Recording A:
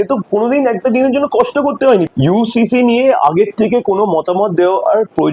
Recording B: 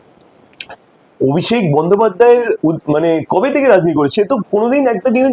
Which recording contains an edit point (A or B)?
A